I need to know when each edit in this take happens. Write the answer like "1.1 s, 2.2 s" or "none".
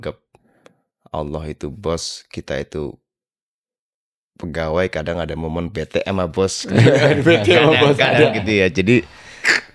none